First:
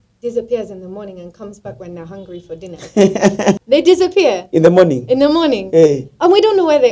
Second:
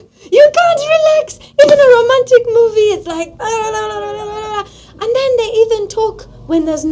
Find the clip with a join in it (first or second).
first